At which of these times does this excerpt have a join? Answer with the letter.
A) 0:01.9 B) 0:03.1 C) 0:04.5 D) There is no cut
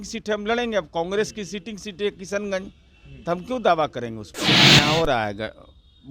C